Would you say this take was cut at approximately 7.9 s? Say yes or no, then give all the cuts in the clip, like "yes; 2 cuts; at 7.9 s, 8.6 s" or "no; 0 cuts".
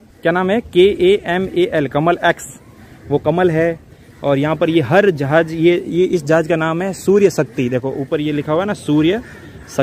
no; 0 cuts